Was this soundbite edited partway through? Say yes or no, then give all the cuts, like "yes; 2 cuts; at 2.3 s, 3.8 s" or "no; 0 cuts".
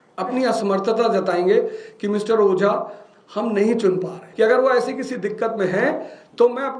yes; 1 cut; at 4.2 s